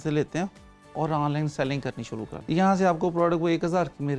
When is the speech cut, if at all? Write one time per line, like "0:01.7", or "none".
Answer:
0:02.3